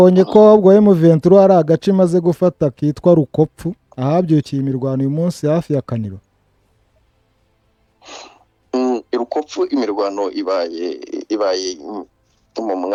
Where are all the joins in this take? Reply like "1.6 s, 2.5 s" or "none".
none